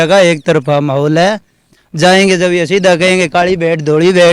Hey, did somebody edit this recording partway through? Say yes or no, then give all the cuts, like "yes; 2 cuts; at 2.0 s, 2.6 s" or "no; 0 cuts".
yes; 1 cut; at 1.6 s